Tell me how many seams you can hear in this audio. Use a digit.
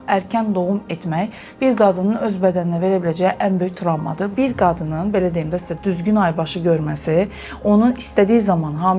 1